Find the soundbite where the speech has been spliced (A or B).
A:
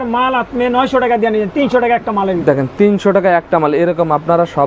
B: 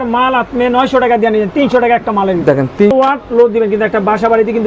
B